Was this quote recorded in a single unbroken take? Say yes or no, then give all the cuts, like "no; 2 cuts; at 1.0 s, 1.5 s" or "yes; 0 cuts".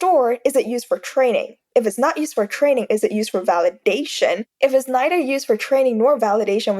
no; 1 cut; at 4.5 s